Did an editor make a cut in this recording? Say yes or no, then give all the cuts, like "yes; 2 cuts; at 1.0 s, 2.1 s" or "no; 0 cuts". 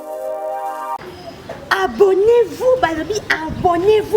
yes; 1 cut; at 1.0 s